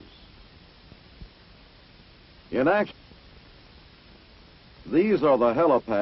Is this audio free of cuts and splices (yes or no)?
yes